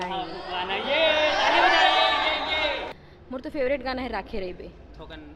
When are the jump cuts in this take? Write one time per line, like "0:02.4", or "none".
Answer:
0:02.9